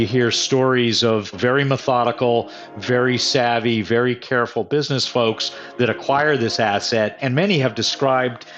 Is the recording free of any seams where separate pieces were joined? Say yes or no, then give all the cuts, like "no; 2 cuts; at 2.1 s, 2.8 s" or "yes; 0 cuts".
no; 2 cuts; at 1.3 s, 7.2 s